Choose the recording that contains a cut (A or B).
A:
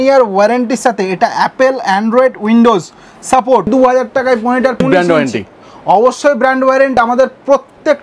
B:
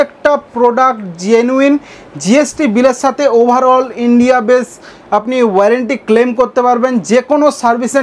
A